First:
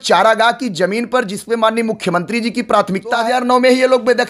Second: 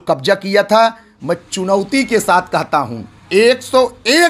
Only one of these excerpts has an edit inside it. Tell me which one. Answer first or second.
first